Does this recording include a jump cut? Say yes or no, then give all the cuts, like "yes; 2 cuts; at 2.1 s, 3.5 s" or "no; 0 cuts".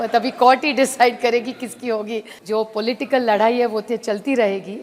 yes; 1 cut; at 2.3 s